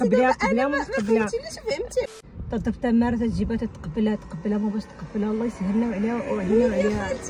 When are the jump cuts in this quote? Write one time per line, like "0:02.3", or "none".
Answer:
0:02.1